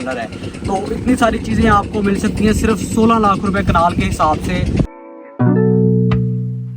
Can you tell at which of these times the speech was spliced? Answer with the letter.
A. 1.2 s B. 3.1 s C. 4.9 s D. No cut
C